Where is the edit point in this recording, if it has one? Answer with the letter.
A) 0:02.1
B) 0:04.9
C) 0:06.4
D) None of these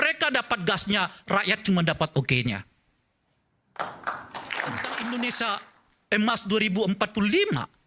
B